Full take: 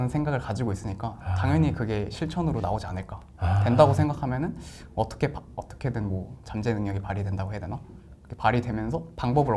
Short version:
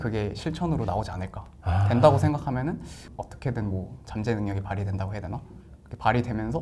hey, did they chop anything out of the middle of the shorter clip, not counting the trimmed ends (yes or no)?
yes